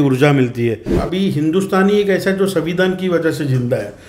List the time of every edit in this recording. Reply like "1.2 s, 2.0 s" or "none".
1.0 s